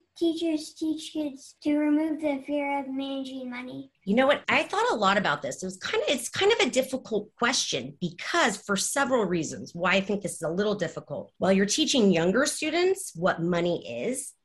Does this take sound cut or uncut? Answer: cut